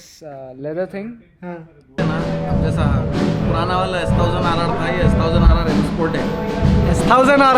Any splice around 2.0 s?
yes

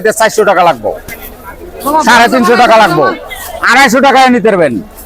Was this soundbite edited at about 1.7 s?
no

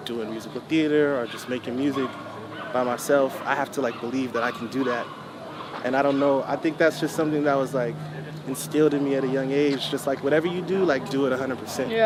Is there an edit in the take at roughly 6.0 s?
no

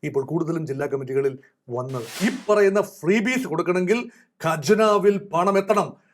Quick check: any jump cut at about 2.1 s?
yes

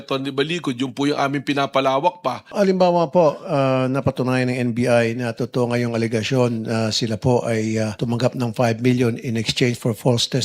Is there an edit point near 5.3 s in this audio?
no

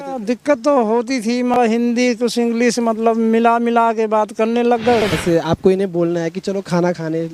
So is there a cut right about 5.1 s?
yes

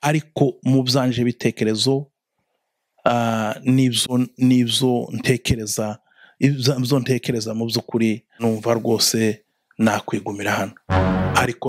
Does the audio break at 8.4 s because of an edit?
yes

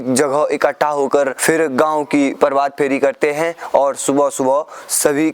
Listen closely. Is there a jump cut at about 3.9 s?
no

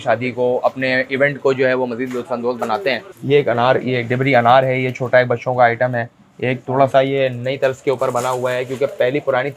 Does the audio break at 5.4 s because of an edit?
no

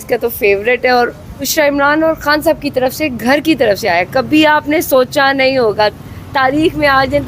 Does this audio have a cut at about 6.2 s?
no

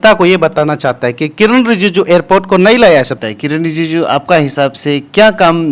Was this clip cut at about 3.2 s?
yes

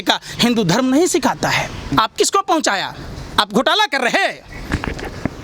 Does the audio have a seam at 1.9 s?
yes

